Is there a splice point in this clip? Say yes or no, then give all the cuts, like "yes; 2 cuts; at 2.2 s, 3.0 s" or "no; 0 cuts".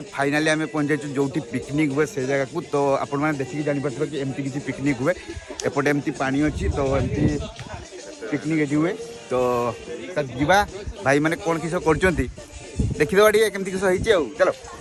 no; 0 cuts